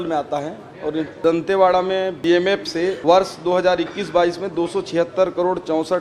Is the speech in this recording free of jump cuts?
no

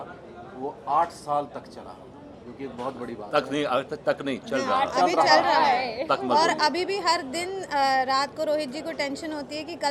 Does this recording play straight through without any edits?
yes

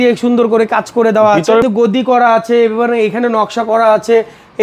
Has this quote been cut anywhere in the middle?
yes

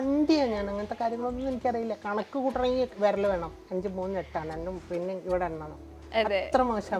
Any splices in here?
yes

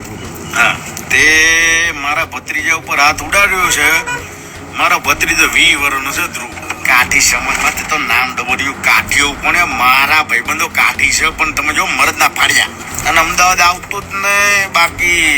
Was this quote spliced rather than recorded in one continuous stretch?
yes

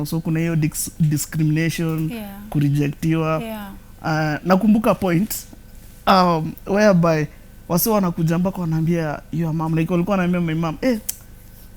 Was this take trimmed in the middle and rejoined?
no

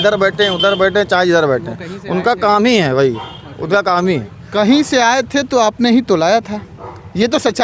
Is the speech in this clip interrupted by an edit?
no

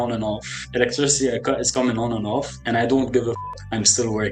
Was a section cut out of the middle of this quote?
yes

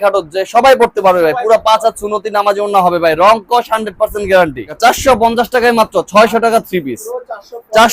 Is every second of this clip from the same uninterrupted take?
no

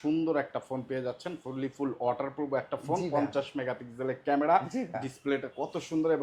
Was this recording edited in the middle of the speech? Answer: no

